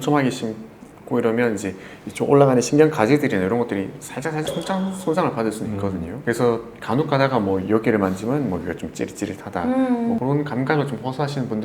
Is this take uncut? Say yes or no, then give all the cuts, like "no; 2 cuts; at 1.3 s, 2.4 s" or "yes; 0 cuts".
yes; 0 cuts